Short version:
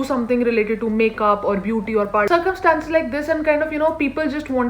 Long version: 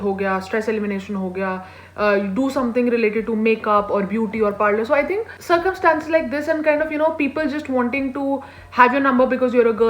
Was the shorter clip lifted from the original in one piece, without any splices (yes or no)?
no